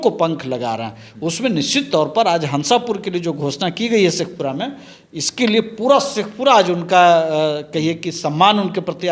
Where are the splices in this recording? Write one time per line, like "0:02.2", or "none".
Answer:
none